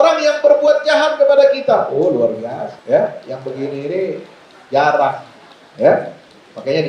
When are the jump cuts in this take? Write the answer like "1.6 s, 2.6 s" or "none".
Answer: 2.7 s

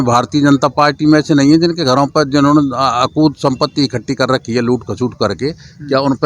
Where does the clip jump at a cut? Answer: none

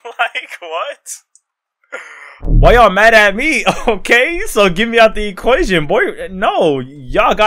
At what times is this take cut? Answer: 2.5 s

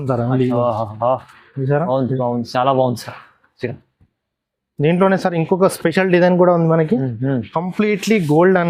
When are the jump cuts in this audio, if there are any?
none

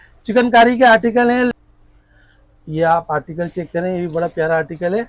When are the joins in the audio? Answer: 1.7 s

